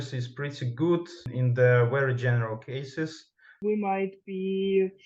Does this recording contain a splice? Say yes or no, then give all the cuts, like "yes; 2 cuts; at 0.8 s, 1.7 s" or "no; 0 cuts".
yes; 2 cuts; at 1.3 s, 3.5 s